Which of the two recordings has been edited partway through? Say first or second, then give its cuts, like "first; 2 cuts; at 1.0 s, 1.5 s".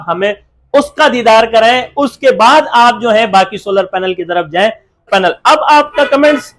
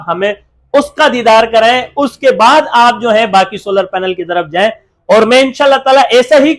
first; 1 cut; at 5.0 s